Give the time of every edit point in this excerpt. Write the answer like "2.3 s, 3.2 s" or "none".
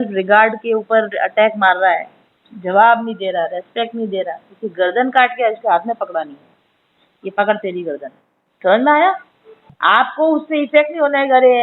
9.7 s